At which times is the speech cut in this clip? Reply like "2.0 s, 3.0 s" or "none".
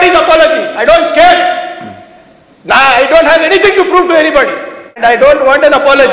5.0 s